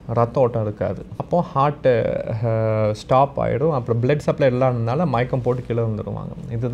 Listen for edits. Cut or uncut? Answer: uncut